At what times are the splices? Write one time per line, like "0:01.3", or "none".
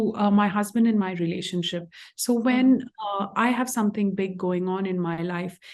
none